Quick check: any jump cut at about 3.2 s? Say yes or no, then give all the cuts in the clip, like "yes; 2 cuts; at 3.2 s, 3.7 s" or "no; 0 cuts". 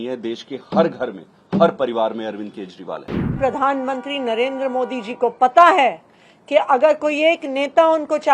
yes; 1 cut; at 3.2 s